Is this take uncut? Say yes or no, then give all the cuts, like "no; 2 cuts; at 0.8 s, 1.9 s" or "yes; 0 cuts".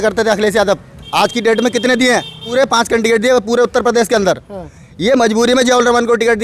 no; 2 cuts; at 0.9 s, 2.4 s